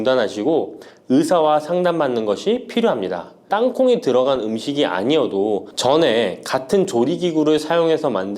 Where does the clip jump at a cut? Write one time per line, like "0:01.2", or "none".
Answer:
0:03.4